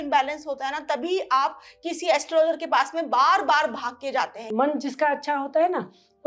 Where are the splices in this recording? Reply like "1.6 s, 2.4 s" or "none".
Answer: 4.4 s